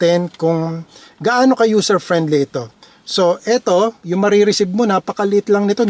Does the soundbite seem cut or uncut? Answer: uncut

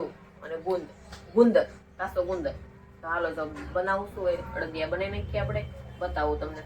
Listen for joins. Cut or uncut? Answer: uncut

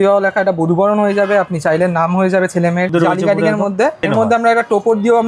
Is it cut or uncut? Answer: cut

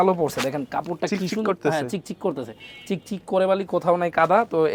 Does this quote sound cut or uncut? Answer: uncut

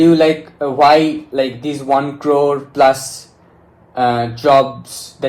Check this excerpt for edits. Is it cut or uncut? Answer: uncut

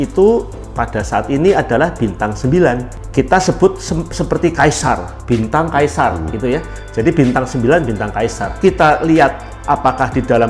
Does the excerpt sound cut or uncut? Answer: cut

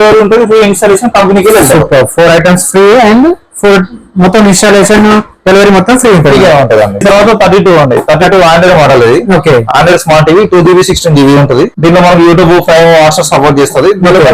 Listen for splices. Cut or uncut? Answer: uncut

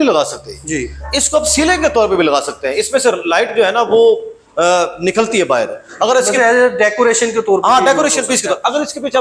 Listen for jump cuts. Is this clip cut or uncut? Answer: uncut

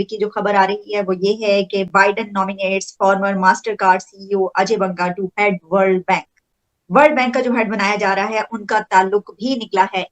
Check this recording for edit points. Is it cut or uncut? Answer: cut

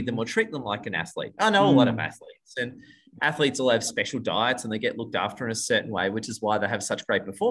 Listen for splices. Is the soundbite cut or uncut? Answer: uncut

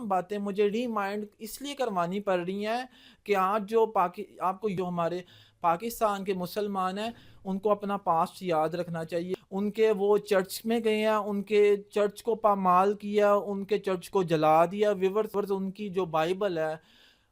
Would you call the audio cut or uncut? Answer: cut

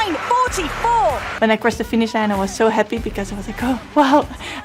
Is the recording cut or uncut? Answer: cut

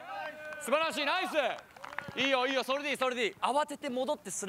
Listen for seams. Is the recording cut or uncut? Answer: cut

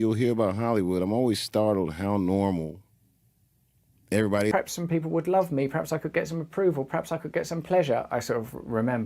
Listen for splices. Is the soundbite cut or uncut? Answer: cut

